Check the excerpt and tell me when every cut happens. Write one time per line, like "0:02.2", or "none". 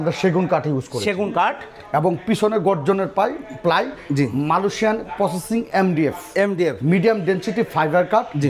none